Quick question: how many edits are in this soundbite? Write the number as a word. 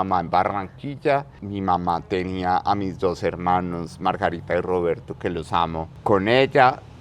two